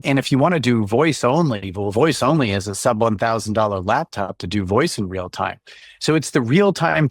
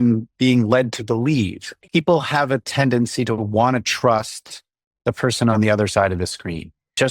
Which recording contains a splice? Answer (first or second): second